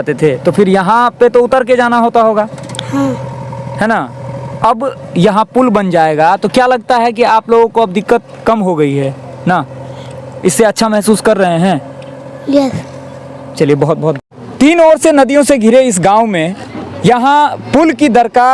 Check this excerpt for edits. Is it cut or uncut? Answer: uncut